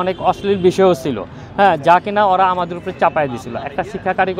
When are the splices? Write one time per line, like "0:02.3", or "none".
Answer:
none